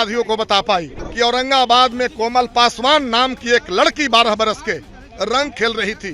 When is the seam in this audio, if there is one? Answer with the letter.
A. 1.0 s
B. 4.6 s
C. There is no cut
A